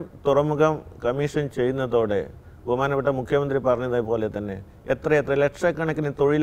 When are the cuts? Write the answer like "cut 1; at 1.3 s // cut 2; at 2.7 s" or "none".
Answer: none